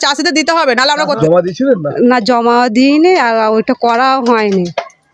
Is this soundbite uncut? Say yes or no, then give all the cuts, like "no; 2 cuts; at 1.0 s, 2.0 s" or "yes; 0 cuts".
no; 1 cut; at 1.2 s